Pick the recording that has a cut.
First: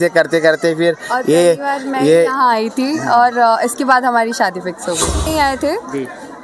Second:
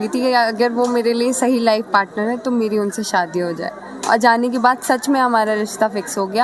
first; 1 cut; at 5.3 s

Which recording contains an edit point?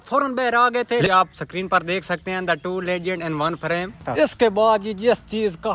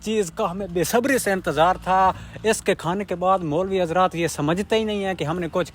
first; 2 cuts; at 1.1 s, 4.1 s

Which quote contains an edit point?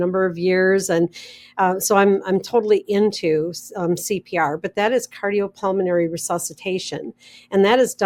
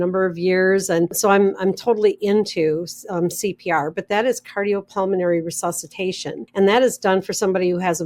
second; 2 cuts; at 1.1 s, 6.4 s

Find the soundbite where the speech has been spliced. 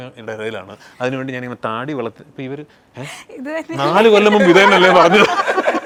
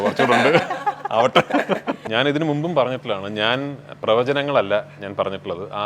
second; 1 cut; at 2.0 s

